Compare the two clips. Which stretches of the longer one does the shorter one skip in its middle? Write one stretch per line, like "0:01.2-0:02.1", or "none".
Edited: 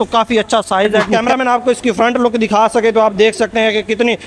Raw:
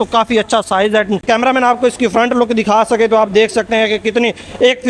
0:01.1-0:01.2